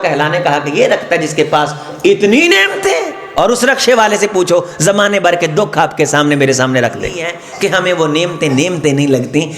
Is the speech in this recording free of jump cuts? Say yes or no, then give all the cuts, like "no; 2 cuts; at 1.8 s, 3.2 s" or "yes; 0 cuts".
no; 2 cuts; at 3.2 s, 7.4 s